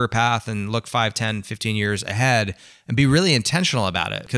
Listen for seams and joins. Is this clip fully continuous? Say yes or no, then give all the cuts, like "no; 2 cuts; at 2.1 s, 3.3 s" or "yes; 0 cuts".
yes; 0 cuts